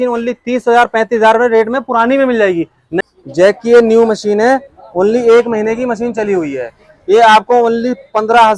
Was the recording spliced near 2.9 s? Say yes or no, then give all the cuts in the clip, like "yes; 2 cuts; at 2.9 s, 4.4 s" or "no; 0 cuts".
yes; 1 cut; at 2.9 s